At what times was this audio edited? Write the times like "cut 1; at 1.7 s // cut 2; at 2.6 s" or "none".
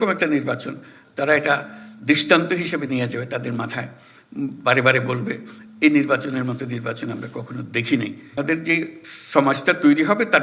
cut 1; at 8.4 s